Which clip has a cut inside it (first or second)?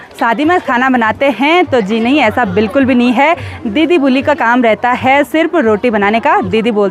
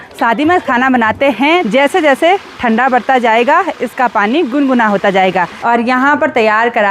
second